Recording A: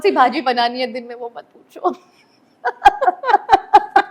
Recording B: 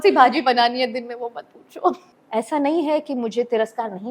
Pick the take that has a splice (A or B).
B